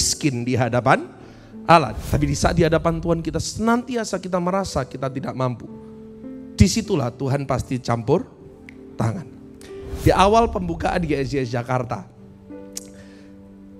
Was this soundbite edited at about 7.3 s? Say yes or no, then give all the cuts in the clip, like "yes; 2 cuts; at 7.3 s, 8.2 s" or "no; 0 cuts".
no; 1 cut; at 2.0 s